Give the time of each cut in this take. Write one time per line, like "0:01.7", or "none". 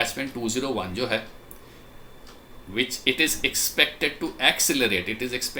none